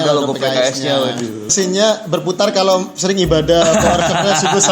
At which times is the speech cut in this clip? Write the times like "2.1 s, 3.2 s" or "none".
1.4 s